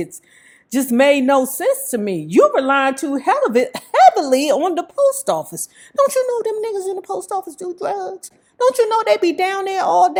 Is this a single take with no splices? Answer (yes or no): yes